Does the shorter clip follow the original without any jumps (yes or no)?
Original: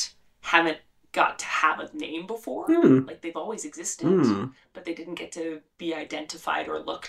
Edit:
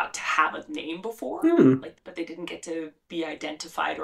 no